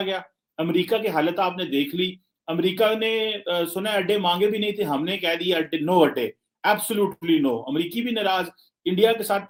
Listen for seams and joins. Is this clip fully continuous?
yes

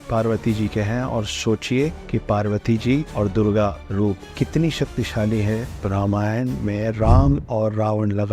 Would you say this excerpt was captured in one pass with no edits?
no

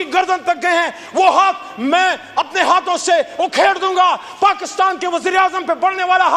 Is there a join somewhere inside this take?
no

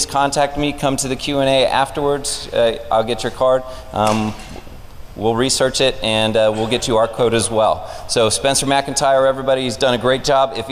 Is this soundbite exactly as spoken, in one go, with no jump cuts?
no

